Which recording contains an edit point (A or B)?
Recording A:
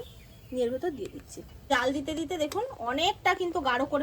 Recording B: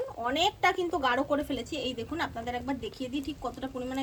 A